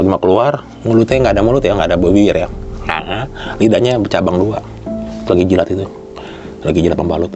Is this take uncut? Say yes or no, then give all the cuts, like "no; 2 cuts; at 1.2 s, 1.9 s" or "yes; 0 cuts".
yes; 0 cuts